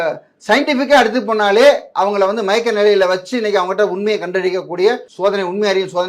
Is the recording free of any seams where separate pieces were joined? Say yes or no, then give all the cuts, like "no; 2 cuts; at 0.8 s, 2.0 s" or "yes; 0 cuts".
no; 1 cut; at 5.1 s